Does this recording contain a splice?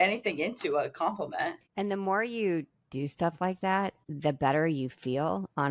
yes; 2 cuts; at 1.6 s, 4.0 s

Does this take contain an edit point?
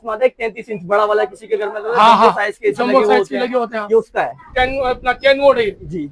yes; 1 cut; at 4.4 s

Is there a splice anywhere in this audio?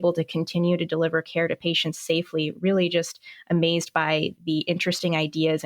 yes; 1 cut; at 4.4 s

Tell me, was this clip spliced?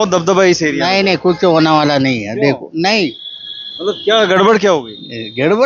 no; 0 cuts

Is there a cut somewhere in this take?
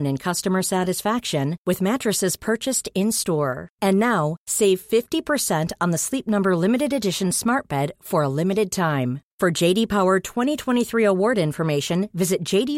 no; 0 cuts

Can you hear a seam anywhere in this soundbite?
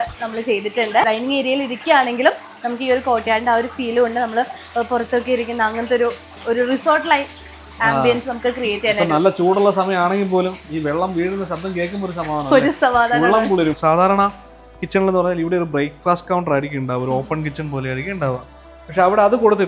yes; 2 cuts; at 1.0 s, 13.8 s

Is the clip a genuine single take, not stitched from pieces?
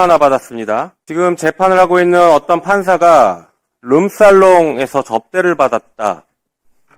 no; 1 cut; at 1.0 s

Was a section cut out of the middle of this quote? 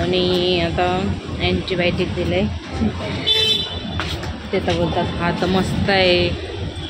no; 0 cuts

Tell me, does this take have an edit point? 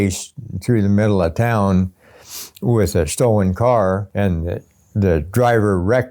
yes; 1 cut; at 4.1 s

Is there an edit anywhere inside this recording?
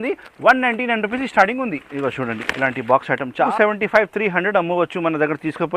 yes; 1 cut; at 3.5 s

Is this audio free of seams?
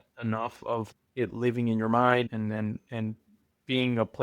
no; 2 cuts; at 0.9 s, 2.3 s

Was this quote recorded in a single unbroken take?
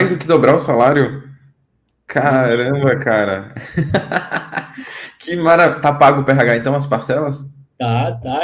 yes; 0 cuts

